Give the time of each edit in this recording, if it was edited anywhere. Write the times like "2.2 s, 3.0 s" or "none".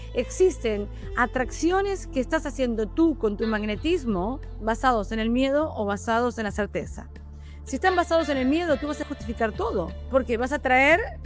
4.6 s, 9.0 s, 10.0 s